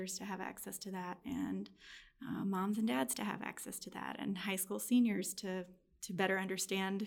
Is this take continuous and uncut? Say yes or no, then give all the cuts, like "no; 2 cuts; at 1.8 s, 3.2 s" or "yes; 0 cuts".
yes; 0 cuts